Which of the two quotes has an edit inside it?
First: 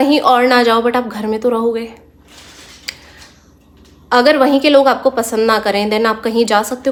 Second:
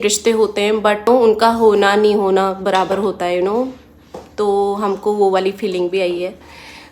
second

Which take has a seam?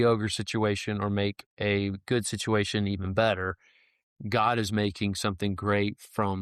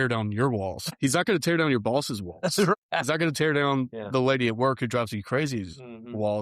second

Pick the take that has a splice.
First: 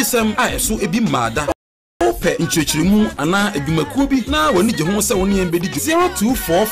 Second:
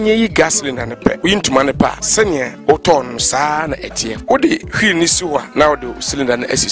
first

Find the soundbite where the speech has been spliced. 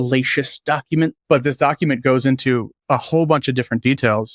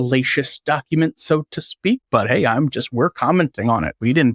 first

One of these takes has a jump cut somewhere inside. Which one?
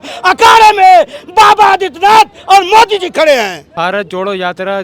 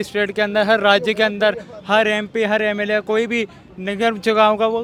first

